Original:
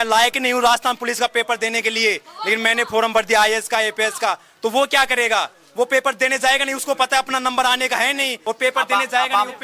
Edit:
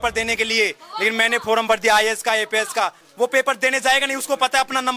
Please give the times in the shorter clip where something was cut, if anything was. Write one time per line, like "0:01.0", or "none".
0:03.0